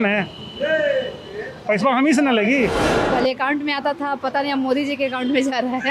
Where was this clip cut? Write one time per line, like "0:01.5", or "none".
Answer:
0:02.9